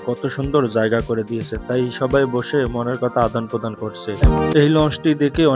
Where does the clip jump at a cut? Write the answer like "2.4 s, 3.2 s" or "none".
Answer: 4.2 s